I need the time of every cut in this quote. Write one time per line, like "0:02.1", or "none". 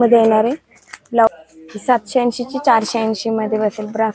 0:01.3